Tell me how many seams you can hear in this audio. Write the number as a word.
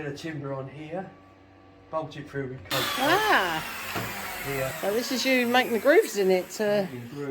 one